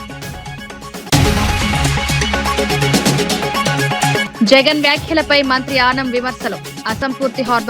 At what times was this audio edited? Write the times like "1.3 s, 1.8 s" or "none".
1.1 s, 2.4 s, 3.8 s